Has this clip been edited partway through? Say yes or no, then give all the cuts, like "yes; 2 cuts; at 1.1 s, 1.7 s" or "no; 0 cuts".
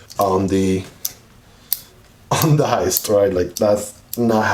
no; 0 cuts